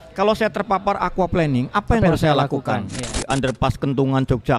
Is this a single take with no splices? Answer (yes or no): no